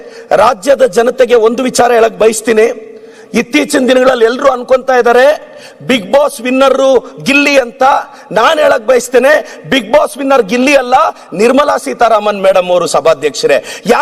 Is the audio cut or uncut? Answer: uncut